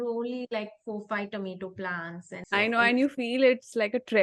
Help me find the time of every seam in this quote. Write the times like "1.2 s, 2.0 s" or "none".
2.4 s